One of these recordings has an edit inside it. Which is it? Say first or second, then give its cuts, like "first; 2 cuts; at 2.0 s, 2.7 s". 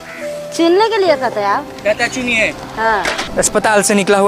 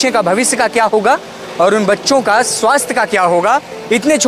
first; 1 cut; at 3.3 s